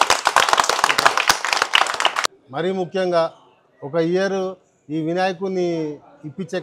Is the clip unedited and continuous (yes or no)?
no